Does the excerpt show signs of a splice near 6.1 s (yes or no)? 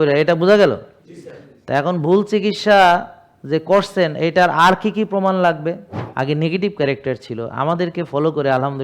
yes